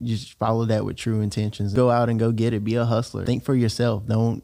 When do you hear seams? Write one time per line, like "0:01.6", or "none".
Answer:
0:01.7
0:03.2